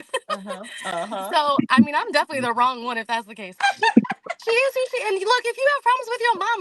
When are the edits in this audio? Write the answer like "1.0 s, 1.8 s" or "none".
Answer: 3.5 s